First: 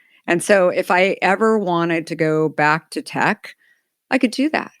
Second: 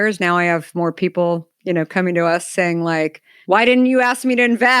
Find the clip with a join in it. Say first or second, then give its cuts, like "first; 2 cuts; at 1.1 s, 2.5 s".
second; 1 cut; at 3.3 s